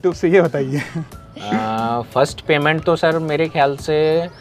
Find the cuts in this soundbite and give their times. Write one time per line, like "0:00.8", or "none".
none